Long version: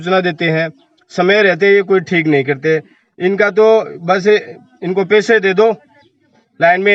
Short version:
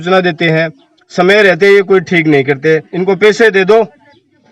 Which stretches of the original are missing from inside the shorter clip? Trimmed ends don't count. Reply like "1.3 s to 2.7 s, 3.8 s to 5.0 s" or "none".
2.9 s to 4.8 s